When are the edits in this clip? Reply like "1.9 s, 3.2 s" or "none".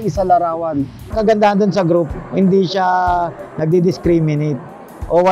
1.0 s

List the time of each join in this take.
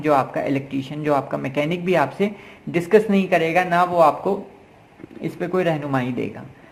none

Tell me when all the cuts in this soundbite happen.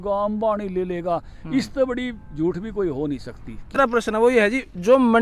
3.8 s

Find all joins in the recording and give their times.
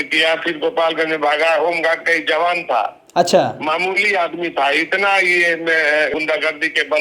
6.1 s

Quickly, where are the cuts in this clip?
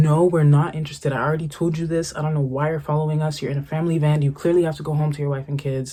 none

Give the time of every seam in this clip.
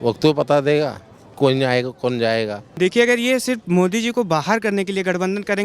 2.6 s

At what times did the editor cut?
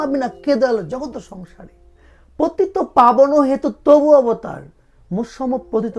none

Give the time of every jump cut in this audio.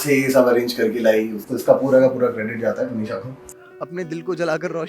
1.4 s, 3.5 s

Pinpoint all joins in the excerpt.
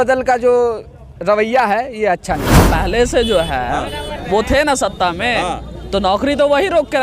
2.6 s

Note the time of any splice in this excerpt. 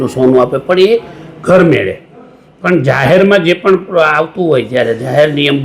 none

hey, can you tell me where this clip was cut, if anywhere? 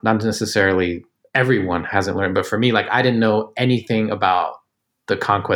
none

